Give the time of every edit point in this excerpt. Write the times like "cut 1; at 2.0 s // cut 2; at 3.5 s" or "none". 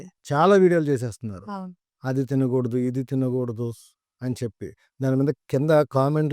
none